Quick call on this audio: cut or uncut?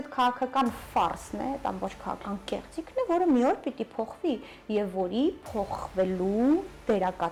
uncut